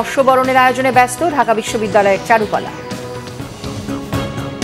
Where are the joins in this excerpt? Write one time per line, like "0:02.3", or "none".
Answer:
0:03.7